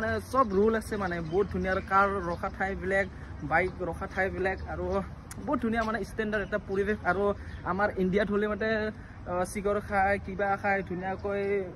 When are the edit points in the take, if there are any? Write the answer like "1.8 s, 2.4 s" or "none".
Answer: none